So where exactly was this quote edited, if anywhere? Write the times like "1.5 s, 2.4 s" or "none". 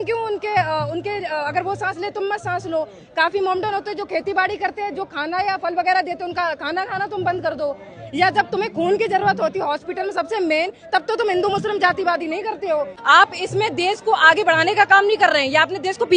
12.9 s